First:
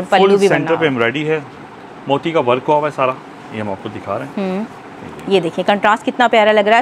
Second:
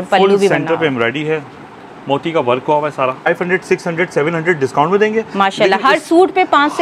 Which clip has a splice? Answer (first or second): second